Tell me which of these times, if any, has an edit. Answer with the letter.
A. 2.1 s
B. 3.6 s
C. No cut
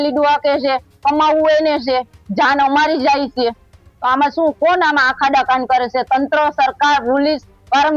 C